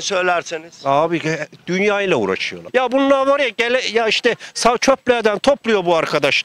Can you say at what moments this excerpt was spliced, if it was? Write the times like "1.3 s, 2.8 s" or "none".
2.6 s